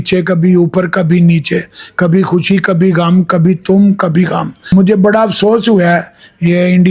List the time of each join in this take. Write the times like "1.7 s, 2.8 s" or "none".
4.7 s